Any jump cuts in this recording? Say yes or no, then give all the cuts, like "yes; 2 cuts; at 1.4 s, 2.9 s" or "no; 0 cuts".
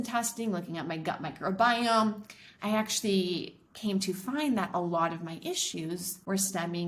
no; 0 cuts